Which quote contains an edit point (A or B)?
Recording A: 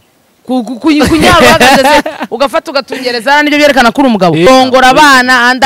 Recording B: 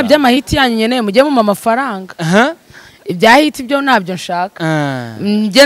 A